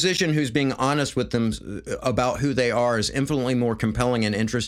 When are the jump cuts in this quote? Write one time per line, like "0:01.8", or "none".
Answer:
none